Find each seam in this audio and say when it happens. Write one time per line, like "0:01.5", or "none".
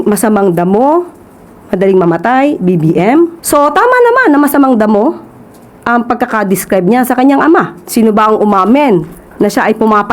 0:03.4
0:07.8

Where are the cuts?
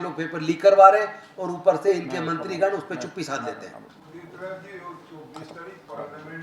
none

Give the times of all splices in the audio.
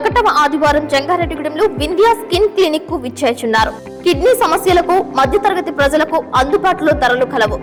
none

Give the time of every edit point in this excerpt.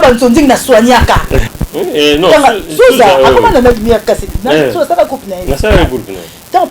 0:01.5

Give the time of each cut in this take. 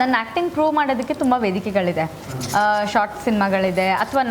none

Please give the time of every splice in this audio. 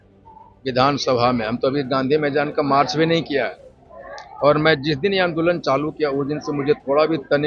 none

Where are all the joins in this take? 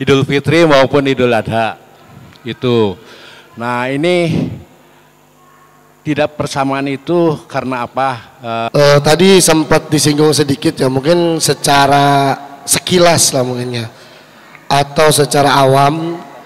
0:08.7

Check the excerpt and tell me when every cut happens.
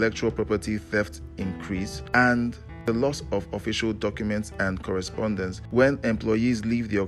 0:02.0
0:02.7
0:05.6

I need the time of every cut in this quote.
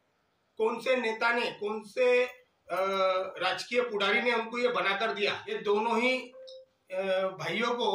0:05.5

